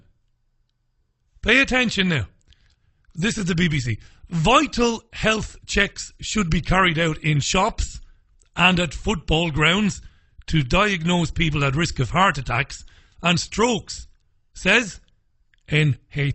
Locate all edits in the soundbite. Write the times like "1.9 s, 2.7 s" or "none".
none